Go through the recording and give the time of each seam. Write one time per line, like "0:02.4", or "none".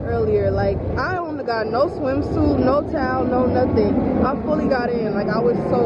none